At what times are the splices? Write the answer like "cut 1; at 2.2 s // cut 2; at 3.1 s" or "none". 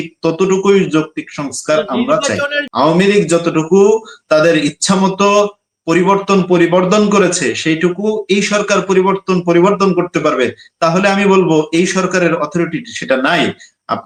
none